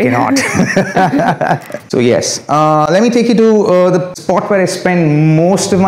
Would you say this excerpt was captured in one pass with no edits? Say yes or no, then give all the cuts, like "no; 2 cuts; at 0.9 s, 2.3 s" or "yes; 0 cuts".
yes; 0 cuts